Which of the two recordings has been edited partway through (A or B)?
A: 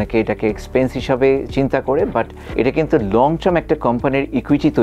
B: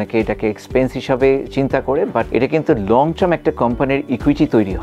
B